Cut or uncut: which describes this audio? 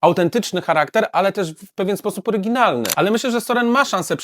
cut